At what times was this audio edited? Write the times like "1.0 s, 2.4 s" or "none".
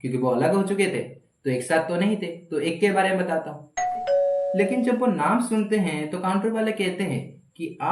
4.0 s